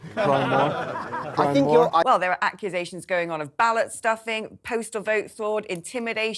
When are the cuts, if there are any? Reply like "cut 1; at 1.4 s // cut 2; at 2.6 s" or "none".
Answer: cut 1; at 2.0 s